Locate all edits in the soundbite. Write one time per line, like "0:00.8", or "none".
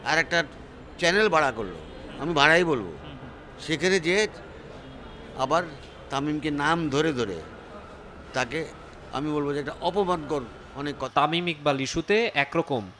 0:11.1